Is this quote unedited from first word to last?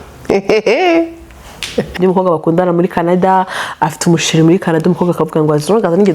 no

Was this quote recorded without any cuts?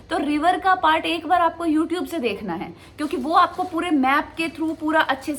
yes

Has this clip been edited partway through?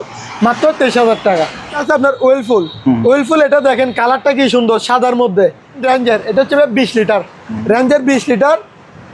yes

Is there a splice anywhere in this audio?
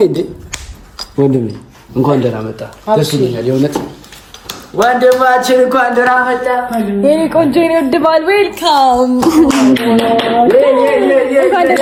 no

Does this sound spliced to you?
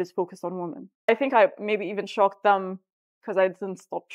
yes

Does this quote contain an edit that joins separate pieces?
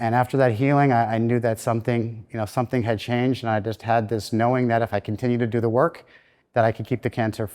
no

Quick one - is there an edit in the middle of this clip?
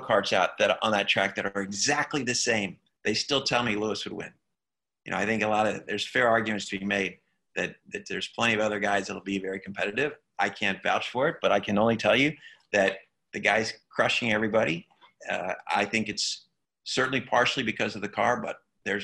no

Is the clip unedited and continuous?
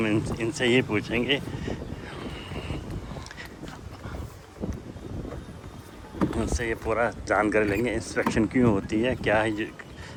yes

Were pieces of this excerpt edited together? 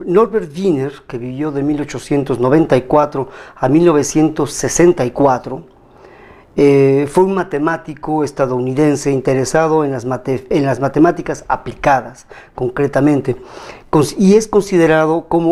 no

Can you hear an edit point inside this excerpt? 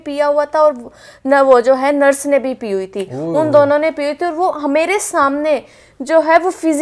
no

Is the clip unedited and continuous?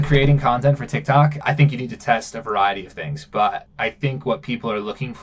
no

